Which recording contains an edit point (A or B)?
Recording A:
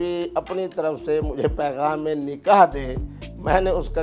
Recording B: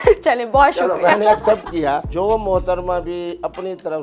B